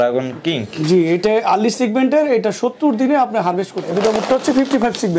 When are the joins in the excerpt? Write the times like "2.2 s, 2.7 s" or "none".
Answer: 3.9 s